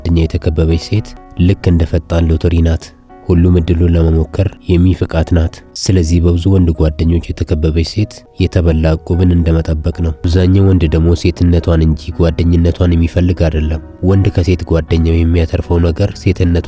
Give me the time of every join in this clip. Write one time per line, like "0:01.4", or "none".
0:01.1
0:05.7
0:08.2
0:10.3

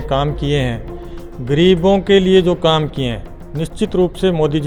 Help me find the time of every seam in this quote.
none

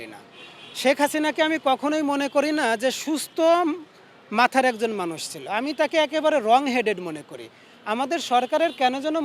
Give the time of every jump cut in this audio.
none

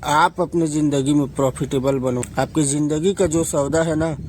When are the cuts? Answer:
0:02.3

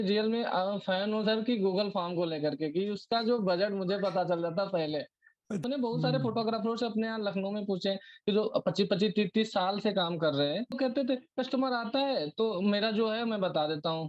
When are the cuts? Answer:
0:05.6
0:10.7

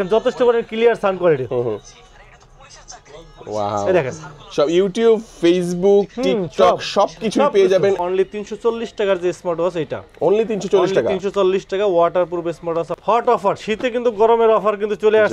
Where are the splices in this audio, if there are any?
0:08.0
0:12.9

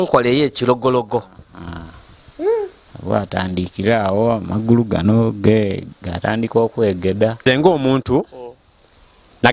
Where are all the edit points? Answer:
0:07.4

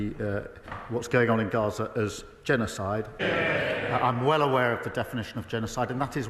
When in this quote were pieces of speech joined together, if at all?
0:03.2

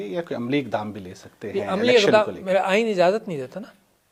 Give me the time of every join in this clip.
none

